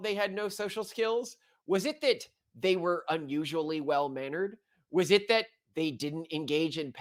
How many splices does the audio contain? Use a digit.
0